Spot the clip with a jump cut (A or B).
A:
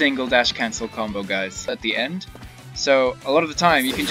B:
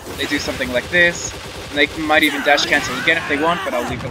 A